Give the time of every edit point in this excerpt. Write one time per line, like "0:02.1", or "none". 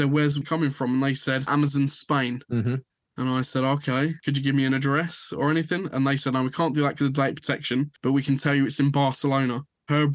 0:01.5
0:04.2